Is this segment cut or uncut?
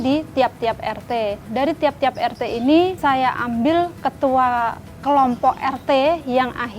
cut